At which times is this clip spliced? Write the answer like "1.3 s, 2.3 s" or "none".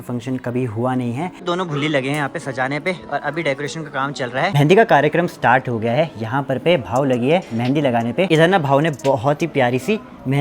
1.4 s, 4.5 s, 8.3 s